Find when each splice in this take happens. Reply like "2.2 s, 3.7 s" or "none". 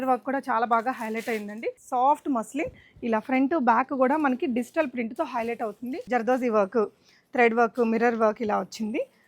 1.7 s, 6.0 s